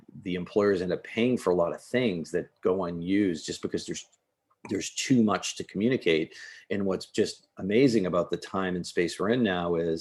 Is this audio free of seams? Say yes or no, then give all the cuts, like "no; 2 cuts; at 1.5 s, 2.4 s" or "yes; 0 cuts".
yes; 0 cuts